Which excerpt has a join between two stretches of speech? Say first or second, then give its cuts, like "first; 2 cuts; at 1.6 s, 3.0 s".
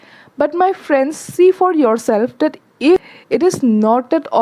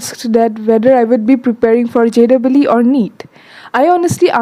first; 1 cut; at 3.0 s